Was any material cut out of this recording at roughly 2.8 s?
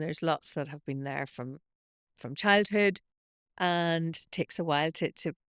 no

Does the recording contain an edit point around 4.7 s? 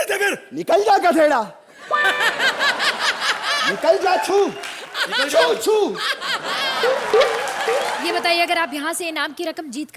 no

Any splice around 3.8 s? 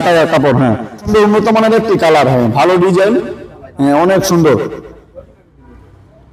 no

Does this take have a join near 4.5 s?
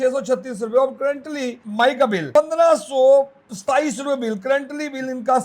no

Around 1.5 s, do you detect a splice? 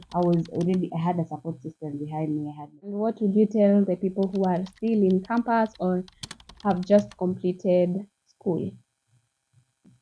no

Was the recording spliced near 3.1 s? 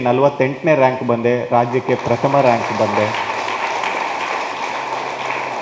no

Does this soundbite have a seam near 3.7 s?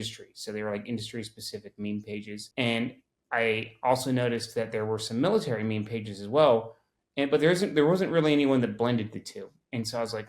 no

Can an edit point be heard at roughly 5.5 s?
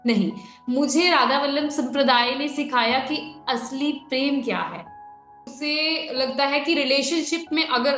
yes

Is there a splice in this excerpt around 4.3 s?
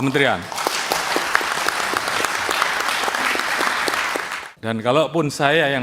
yes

